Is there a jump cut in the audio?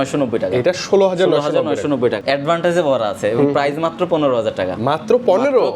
yes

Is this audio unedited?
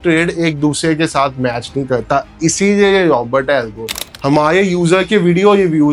yes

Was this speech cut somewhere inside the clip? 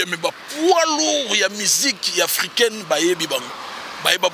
no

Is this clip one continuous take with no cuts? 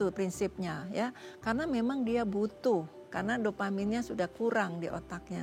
yes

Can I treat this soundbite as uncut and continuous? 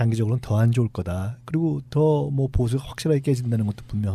no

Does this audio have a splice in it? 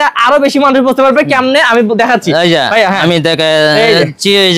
no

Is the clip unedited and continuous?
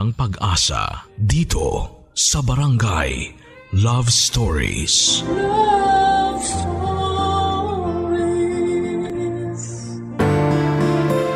no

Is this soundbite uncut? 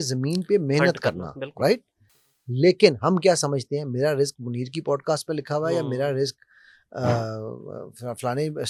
yes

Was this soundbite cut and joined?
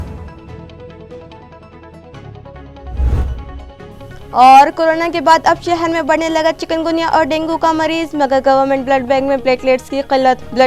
no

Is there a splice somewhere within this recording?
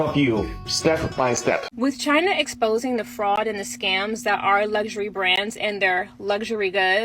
yes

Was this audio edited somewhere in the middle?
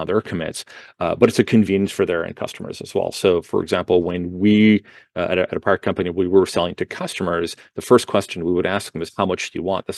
no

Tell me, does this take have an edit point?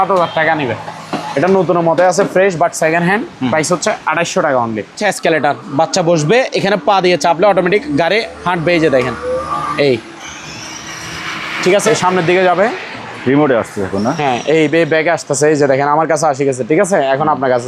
yes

